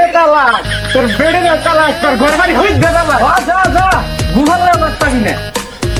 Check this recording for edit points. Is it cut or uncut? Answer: uncut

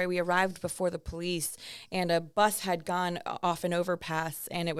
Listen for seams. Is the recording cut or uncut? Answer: uncut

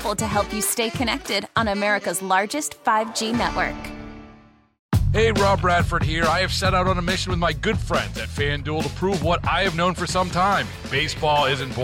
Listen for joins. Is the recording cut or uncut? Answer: cut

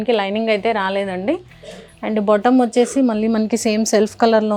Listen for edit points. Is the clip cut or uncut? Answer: uncut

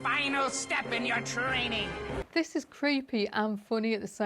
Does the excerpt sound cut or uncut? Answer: cut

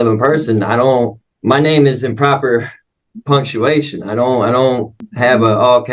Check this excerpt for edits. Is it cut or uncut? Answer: cut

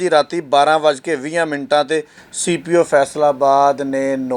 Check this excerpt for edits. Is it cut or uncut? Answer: uncut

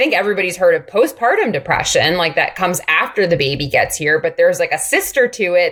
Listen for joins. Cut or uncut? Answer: uncut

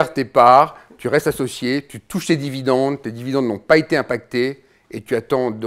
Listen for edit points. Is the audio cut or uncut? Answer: uncut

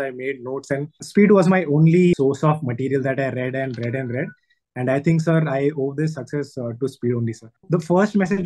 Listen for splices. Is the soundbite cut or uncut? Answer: cut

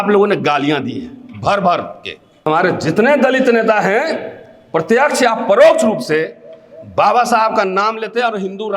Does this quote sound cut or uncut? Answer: cut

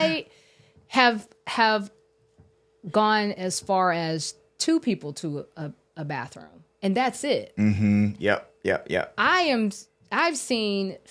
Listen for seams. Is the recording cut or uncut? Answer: uncut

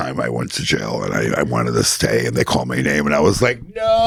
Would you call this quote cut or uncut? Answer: uncut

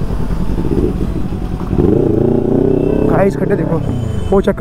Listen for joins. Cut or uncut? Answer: uncut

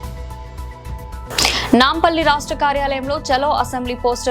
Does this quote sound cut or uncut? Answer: uncut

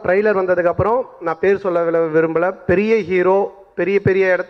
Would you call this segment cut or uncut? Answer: uncut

